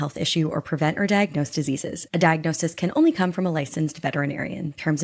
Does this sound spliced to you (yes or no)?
no